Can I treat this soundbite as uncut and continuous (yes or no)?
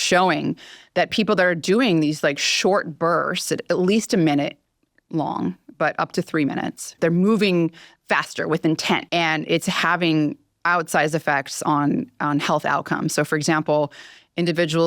no